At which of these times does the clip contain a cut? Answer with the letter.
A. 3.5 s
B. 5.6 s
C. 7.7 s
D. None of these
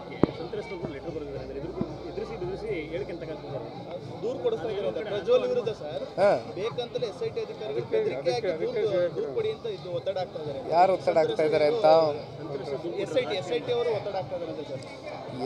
D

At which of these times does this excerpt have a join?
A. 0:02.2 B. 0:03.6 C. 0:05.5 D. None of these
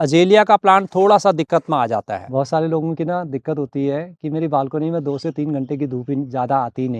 A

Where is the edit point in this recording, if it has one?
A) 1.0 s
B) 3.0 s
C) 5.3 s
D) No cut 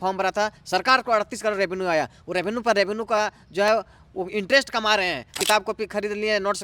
C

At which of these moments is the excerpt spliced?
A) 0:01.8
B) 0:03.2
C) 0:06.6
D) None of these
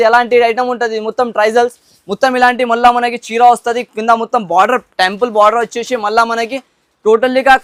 D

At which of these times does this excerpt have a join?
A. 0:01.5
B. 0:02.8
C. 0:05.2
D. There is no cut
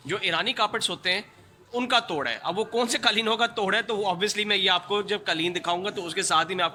D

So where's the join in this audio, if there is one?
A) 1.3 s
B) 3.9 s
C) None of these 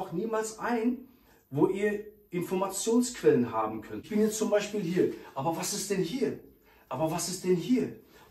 B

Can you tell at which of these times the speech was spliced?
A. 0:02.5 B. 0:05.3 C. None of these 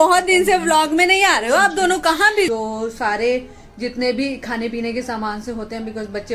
A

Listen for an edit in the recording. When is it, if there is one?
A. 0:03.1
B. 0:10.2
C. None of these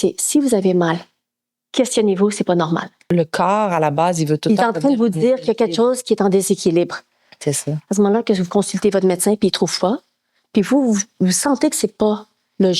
A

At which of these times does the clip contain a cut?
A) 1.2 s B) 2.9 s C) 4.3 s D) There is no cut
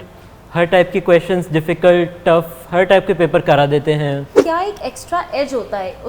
C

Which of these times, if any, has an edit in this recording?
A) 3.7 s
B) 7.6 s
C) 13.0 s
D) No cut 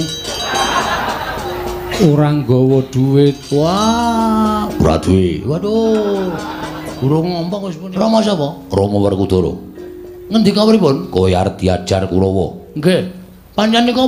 B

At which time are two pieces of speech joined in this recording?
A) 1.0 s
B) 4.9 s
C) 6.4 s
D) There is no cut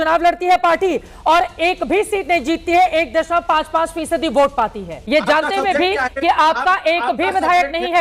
B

